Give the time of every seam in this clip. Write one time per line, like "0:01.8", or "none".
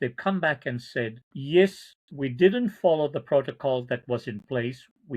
0:01.3